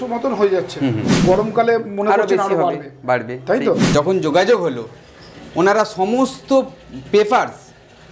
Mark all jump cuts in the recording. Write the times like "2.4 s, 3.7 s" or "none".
1.1 s, 3.9 s

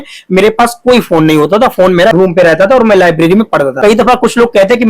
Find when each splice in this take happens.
2.1 s, 3.8 s

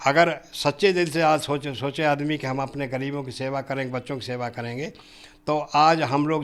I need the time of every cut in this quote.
none

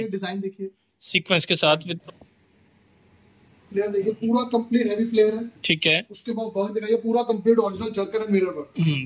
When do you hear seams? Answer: 1.9 s

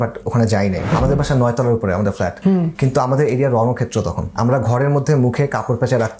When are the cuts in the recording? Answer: 0.9 s, 2.5 s, 4.2 s

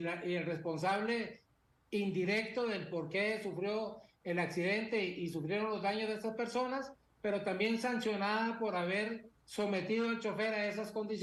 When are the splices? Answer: none

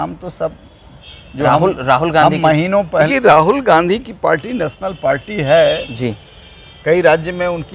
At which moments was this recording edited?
3.1 s

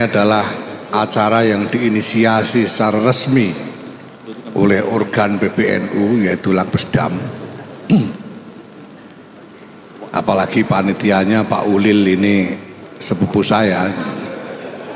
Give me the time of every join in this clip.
none

